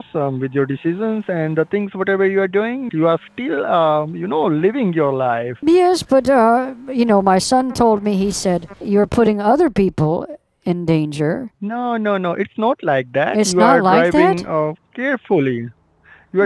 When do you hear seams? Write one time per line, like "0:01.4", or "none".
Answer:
0:02.9
0:05.6
0:08.7
0:11.5